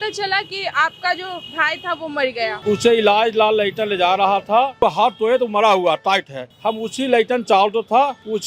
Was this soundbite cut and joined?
yes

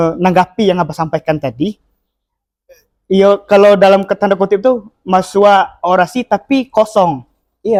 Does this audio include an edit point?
no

